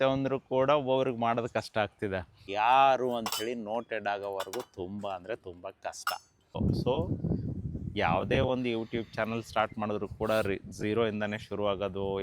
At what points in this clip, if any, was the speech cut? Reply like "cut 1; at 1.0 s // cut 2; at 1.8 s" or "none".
cut 1; at 2.4 s // cut 2; at 6.6 s

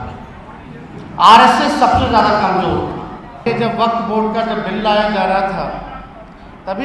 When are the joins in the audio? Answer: cut 1; at 3.5 s

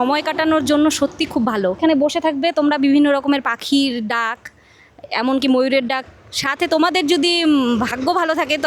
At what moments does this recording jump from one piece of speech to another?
cut 1; at 1.8 s

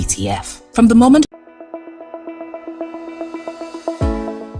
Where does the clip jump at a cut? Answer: cut 1; at 1.2 s

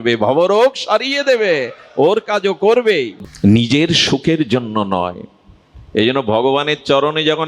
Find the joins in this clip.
cut 1; at 3.2 s

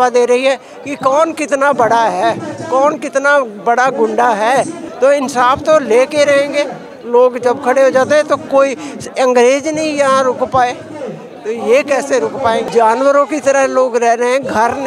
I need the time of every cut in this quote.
cut 1; at 4.8 s // cut 2; at 12.7 s

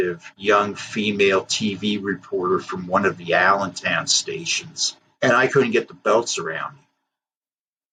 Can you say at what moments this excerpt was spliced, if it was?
none

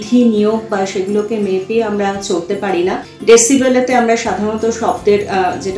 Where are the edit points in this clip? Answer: cut 1; at 3.1 s

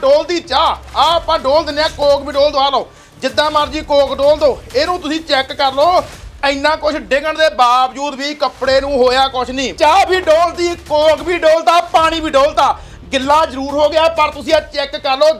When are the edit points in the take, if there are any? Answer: cut 1; at 9.7 s

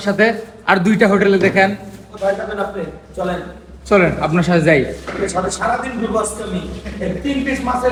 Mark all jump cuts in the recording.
none

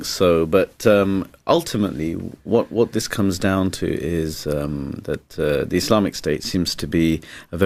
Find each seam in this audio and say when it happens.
none

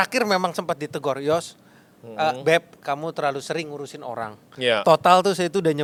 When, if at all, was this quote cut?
none

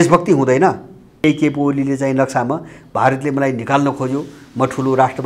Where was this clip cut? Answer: cut 1; at 1.2 s

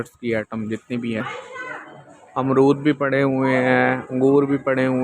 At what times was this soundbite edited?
cut 1; at 1.2 s

